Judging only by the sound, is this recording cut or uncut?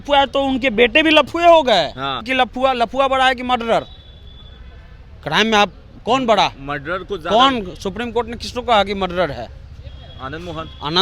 cut